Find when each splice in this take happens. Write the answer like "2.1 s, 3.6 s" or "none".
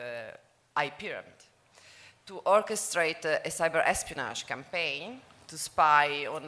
3.5 s